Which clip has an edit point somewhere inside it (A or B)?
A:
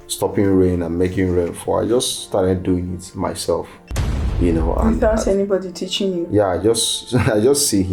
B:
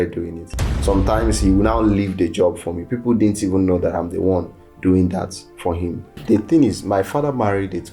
B